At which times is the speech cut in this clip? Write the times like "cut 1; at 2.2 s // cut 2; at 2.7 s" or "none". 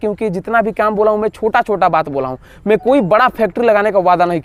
none